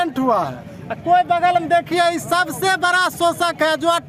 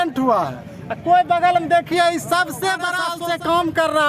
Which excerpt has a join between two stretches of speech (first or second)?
second